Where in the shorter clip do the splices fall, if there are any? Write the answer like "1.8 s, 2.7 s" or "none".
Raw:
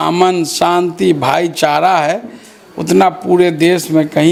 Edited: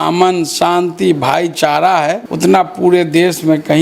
2.3 s